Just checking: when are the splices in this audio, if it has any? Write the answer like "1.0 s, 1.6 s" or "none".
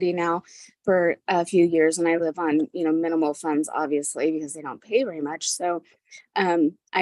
none